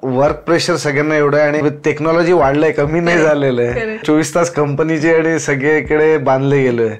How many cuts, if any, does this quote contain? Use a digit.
2